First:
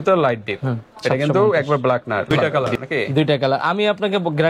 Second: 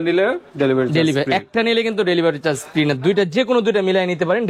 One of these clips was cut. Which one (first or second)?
first